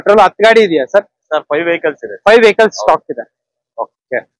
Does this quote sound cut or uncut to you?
uncut